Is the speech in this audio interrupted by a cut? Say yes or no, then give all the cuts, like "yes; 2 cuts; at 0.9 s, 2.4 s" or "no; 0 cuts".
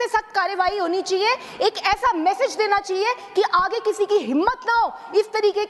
no; 0 cuts